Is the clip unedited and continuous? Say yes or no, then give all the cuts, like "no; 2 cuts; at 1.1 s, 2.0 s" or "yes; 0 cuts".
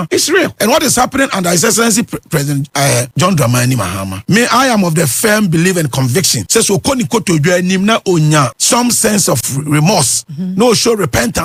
yes; 0 cuts